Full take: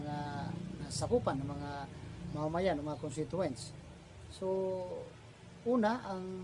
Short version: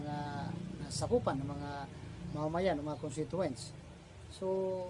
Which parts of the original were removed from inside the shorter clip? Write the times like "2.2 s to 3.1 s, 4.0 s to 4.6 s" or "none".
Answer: none